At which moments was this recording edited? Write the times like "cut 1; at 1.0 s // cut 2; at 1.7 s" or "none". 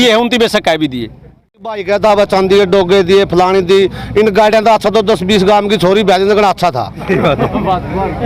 cut 1; at 1.8 s